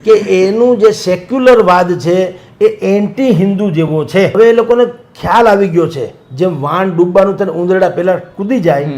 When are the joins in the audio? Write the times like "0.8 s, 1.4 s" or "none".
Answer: 4.3 s